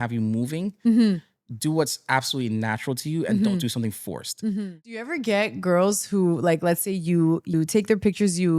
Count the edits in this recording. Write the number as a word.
two